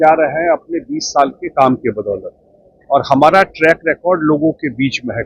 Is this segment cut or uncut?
uncut